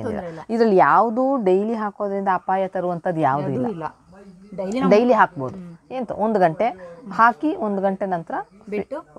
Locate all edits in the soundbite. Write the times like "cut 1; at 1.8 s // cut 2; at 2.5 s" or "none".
none

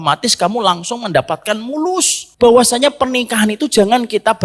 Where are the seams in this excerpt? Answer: cut 1; at 2.2 s

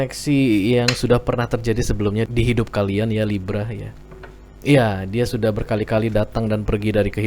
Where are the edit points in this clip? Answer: cut 1; at 2.3 s

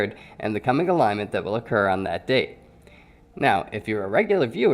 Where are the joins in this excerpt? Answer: cut 1; at 2.2 s

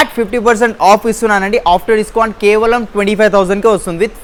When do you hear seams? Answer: none

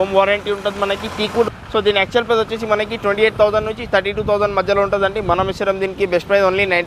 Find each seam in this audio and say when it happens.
cut 1; at 1.5 s

